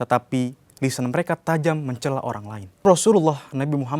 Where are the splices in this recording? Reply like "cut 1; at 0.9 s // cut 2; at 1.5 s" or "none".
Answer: cut 1; at 2.8 s